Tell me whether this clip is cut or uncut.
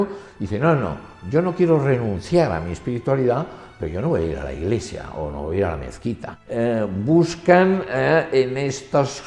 cut